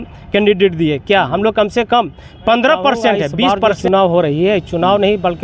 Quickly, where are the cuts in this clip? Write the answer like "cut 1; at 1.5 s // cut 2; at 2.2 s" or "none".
cut 1; at 3.7 s